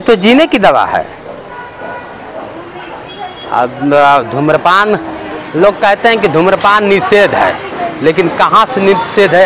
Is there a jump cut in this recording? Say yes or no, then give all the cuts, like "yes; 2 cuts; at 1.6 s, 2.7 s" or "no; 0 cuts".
no; 0 cuts